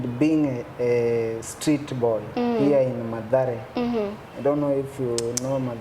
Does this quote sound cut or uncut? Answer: uncut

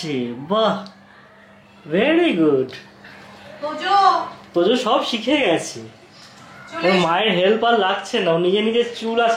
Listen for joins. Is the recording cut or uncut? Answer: uncut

